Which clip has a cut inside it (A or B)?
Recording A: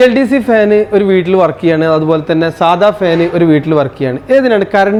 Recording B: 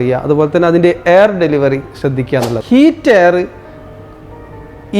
B